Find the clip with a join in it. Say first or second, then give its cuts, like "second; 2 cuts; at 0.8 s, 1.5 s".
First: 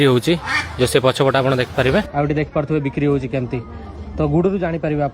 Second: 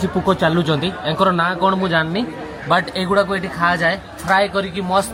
first; 1 cut; at 2.5 s